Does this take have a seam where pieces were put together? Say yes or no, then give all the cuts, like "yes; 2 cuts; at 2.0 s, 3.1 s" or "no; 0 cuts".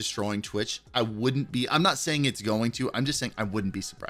no; 0 cuts